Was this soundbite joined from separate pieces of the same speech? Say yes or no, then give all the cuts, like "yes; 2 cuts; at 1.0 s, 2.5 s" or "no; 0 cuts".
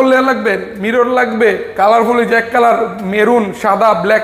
no; 0 cuts